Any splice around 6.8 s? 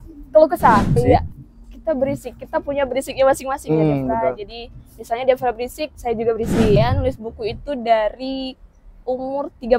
yes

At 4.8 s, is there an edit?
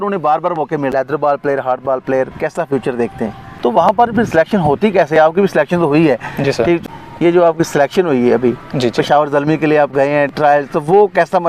no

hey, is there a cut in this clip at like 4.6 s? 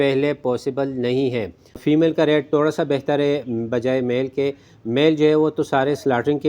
no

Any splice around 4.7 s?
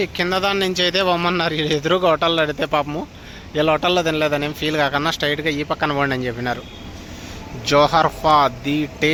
no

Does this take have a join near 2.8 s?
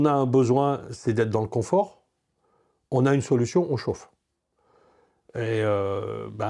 no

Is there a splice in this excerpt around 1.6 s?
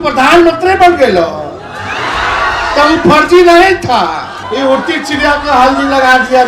no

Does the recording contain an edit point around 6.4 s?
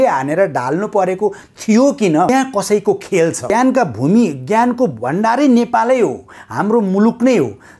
no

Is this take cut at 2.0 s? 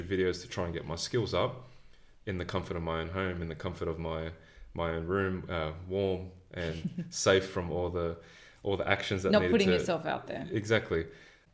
no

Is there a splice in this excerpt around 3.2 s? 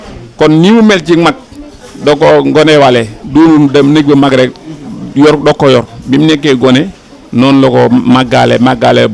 yes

